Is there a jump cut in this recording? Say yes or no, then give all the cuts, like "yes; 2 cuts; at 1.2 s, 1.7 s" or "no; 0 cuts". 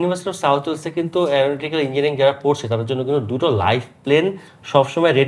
no; 0 cuts